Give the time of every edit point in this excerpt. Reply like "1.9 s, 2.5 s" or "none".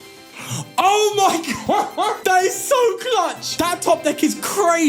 2.2 s, 3.4 s